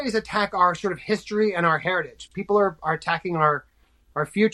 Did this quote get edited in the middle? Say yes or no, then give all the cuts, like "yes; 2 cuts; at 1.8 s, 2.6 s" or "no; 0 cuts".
no; 0 cuts